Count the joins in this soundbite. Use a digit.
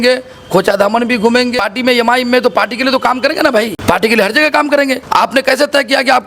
3